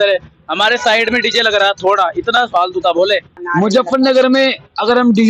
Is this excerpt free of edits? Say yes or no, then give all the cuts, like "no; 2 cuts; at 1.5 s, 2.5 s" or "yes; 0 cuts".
no; 1 cut; at 3.4 s